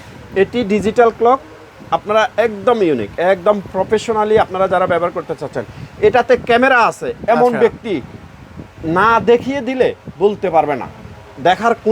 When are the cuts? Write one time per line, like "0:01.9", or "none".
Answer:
none